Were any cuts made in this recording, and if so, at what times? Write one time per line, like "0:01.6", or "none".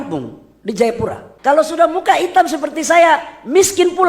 0:01.3